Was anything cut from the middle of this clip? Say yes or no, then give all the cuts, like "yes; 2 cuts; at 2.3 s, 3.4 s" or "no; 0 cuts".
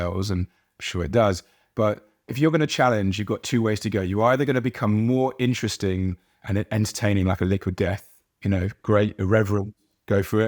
yes; 1 cut; at 2.3 s